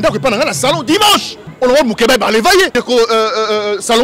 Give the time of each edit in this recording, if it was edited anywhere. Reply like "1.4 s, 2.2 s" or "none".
1.4 s, 2.7 s